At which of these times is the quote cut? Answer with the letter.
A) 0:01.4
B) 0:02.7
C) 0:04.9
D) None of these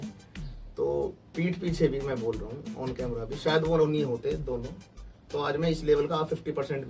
D